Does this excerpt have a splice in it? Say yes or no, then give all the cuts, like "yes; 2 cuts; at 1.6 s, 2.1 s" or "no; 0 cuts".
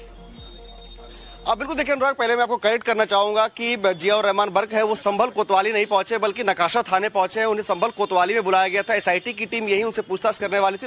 no; 0 cuts